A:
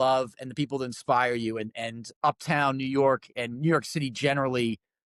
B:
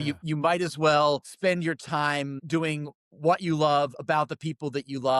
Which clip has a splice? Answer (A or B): B